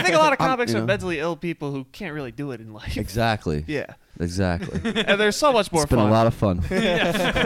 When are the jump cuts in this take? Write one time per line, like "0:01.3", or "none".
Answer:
0:04.0
0:05.1